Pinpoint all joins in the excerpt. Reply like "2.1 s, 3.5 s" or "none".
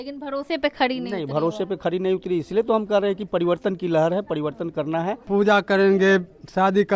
5.2 s